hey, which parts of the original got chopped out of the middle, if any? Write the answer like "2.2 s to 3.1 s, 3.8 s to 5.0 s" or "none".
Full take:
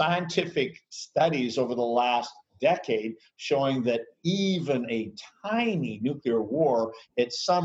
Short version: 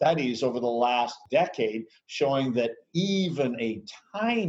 2.3 s to 2.5 s